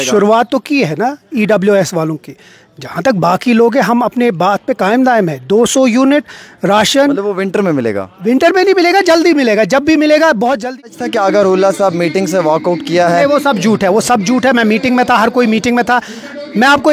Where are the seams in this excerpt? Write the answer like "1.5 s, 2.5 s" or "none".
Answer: 10.7 s